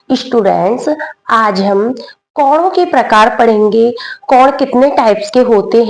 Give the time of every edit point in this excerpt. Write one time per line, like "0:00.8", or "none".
none